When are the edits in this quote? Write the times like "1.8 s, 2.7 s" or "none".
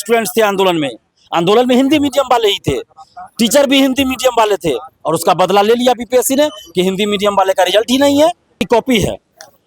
8.7 s